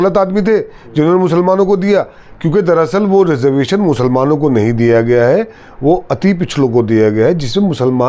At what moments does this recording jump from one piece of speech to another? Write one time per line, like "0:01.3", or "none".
none